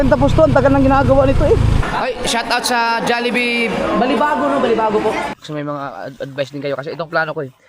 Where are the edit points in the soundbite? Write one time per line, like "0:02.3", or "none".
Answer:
0:01.8
0:05.3